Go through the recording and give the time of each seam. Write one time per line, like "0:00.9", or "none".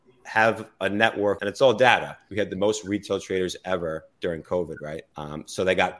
0:01.4
0:02.2
0:05.1